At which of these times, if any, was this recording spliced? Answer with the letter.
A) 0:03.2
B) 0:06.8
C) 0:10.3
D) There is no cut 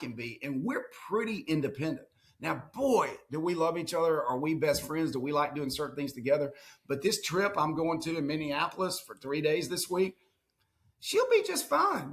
D